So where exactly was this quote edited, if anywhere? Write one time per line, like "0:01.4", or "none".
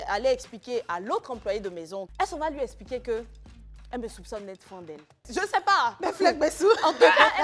0:02.0
0:05.2